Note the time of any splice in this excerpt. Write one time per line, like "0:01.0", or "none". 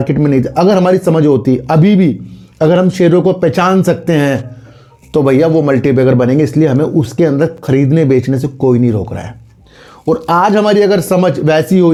none